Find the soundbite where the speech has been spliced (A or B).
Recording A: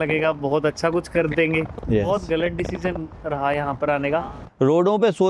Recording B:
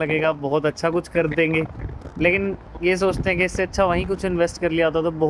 A